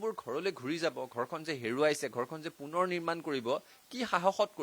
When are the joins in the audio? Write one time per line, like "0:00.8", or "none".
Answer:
none